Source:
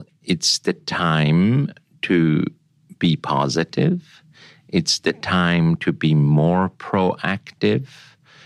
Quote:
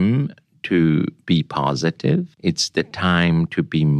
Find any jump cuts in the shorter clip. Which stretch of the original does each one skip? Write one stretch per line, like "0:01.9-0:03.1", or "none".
0:02.6-0:02.9
0:04.1-0:04.6